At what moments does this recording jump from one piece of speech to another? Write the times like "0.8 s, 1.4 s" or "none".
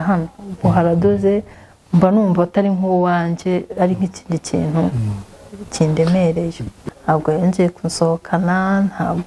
6.7 s